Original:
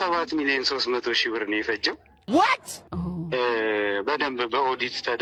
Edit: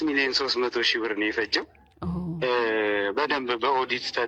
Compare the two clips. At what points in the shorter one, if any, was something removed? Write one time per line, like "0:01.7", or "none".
0:01.8